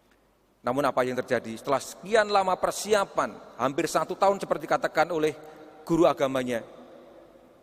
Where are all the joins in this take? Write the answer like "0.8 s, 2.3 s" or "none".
none